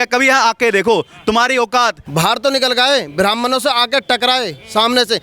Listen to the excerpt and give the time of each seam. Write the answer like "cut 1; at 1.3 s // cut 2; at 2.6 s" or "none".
cut 1; at 2.0 s